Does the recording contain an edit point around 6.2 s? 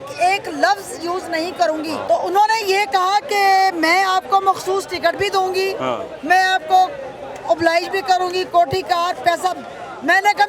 no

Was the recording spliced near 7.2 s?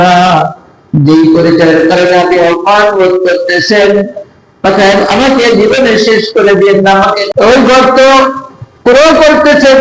yes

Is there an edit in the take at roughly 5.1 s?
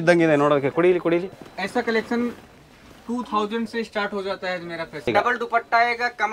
yes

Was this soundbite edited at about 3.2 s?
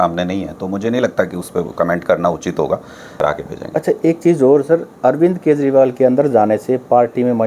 yes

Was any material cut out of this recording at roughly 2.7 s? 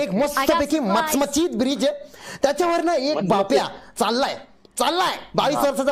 no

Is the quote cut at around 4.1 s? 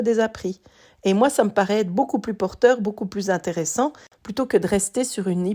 yes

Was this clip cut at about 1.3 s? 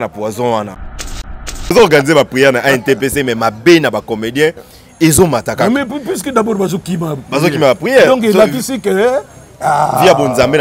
yes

